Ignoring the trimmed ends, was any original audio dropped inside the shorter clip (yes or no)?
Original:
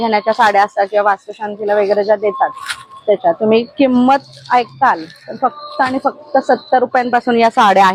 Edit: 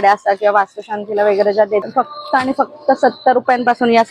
yes